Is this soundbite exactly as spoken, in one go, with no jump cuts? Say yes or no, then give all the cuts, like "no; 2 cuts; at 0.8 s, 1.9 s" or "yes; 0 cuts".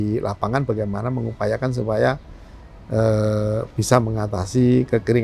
yes; 0 cuts